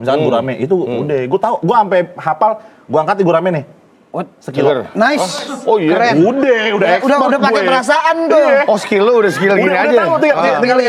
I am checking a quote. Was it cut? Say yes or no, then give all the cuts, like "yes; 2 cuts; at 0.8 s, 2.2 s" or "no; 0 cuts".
no; 0 cuts